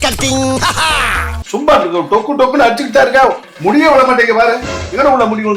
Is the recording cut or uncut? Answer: cut